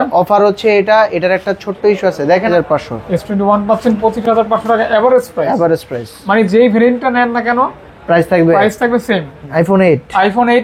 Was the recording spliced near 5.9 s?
no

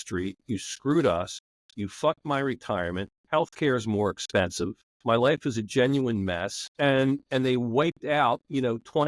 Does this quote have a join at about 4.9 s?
yes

